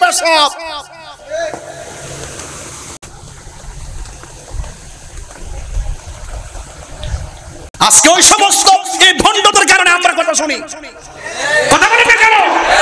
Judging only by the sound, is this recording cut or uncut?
uncut